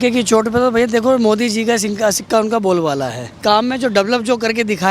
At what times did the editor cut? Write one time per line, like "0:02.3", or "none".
0:03.4